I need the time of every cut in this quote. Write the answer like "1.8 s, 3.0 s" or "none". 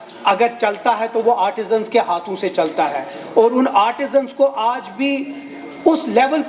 none